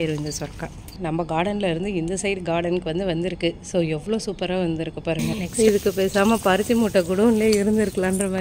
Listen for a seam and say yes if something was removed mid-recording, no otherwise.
yes